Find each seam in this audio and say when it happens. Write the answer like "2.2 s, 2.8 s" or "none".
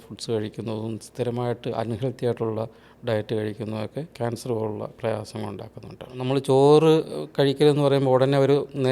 4.1 s, 6.2 s